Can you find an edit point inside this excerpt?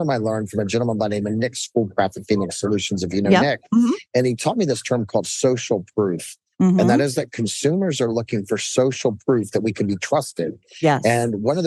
no; 0 cuts

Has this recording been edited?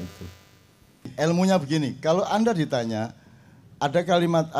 yes; 1 cut; at 1.1 s

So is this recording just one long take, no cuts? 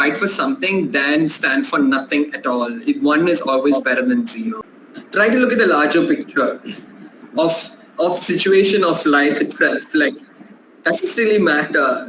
no; 1 cut; at 4.7 s

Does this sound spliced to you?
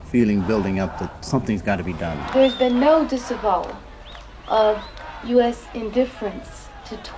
yes; 1 cut; at 2.2 s

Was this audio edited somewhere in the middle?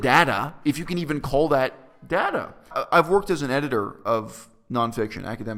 no; 0 cuts

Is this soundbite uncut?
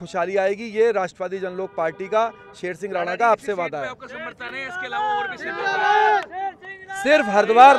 yes; 0 cuts

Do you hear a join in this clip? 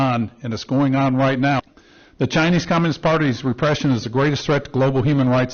yes; 1 cut; at 1.6 s

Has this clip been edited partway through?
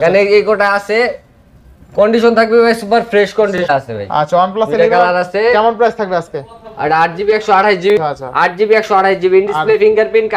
yes; 2 cuts; at 3.7 s, 8.0 s

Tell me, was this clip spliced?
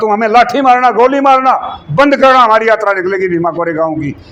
no; 0 cuts

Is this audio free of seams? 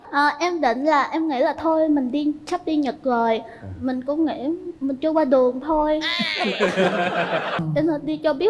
no; 1 cut; at 7.6 s

